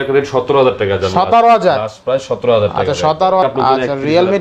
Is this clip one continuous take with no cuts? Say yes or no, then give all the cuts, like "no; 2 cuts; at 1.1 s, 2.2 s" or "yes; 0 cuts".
no; 1 cut; at 3.4 s